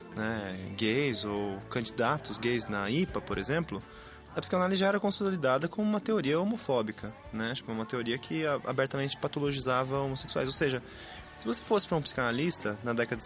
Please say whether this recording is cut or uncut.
uncut